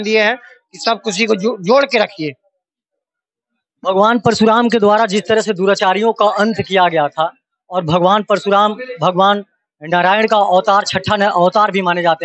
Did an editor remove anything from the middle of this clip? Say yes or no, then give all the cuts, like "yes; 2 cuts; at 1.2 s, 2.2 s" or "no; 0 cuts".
no; 0 cuts